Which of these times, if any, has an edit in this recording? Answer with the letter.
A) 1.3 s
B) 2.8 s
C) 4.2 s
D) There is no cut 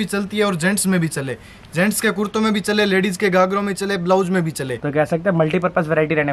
D